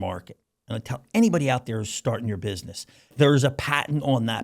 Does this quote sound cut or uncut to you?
cut